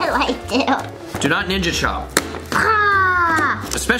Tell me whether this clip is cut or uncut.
uncut